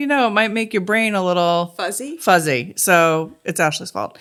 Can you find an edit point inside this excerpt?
no; 0 cuts

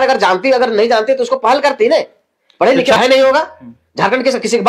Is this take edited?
yes; 1 cut; at 3.0 s

